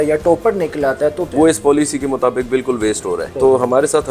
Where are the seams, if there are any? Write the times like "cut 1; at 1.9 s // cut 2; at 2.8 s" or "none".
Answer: cut 1; at 1.3 s // cut 2; at 3.3 s